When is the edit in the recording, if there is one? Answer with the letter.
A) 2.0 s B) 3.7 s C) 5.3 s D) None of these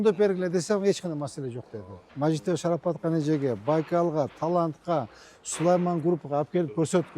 A